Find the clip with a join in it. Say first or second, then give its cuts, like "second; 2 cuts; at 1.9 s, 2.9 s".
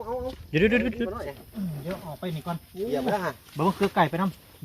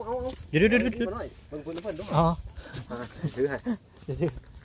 first; 1 cut; at 1.4 s